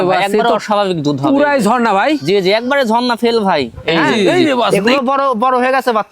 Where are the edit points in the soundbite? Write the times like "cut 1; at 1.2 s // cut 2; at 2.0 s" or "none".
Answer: cut 1; at 4.7 s